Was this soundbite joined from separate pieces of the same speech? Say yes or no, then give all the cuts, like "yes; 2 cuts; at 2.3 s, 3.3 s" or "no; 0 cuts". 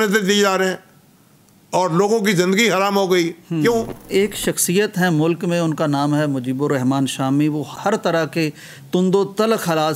yes; 1 cut; at 4.1 s